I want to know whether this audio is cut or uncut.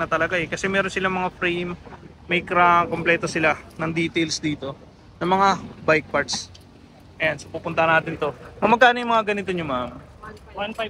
uncut